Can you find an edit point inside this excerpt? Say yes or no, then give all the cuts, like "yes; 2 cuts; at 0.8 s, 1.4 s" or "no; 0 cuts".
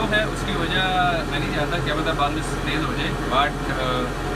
no; 0 cuts